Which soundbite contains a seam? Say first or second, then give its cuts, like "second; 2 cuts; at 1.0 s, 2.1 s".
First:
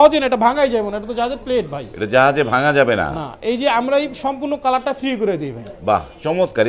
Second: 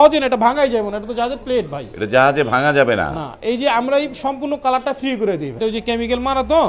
second; 1 cut; at 5.6 s